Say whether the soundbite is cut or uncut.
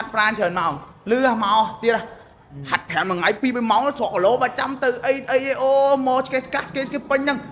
uncut